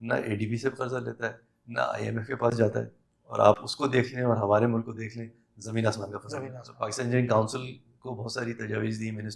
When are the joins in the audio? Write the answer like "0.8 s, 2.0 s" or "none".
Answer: 6.7 s